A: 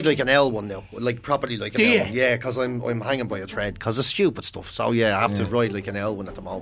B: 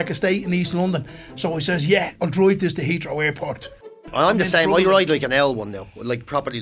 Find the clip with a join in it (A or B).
B